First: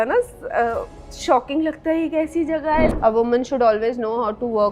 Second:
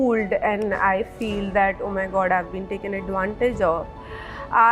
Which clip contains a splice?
first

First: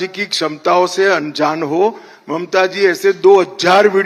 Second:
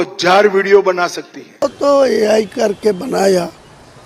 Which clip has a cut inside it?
second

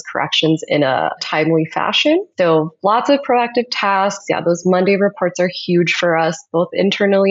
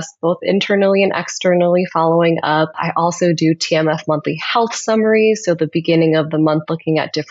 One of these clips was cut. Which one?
first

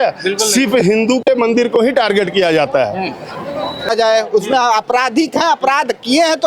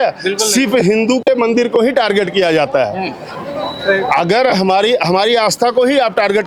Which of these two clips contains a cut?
first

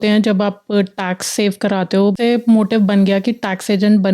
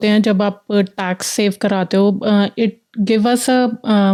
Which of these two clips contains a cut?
first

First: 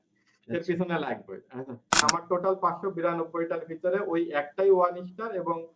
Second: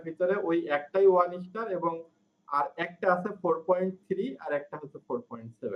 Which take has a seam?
first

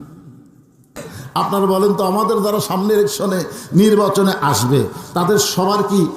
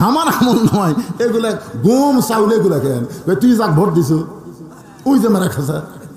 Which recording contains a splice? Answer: first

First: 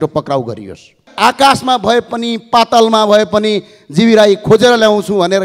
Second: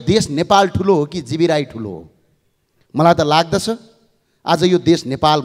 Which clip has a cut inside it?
first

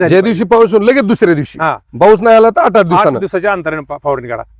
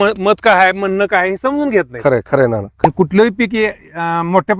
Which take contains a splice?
second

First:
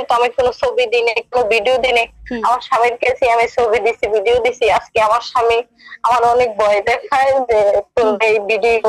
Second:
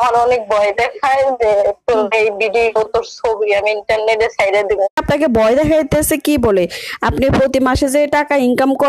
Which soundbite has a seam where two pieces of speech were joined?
second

